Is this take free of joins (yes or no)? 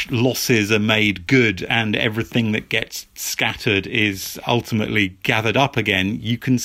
yes